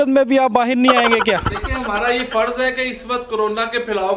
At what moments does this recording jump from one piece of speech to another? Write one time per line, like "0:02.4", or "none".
none